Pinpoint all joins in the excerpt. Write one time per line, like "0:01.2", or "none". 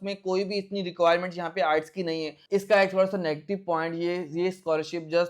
0:02.4